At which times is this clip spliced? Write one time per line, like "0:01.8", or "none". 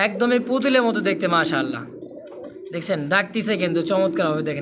none